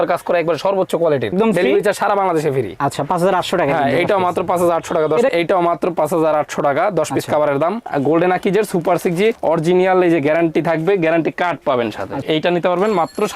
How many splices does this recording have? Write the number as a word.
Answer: four